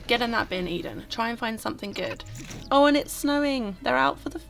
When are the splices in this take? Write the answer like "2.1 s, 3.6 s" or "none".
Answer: 2.6 s